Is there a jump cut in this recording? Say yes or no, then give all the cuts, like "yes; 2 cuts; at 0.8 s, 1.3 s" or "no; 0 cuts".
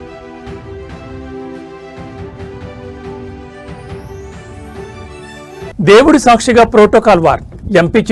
no; 0 cuts